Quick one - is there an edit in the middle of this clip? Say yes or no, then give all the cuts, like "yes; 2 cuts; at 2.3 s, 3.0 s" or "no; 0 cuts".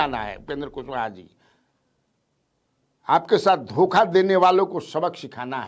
no; 0 cuts